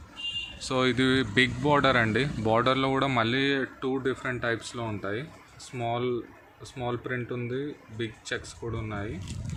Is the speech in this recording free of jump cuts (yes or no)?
yes